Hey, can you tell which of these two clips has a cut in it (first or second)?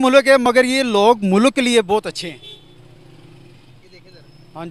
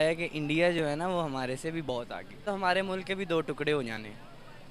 second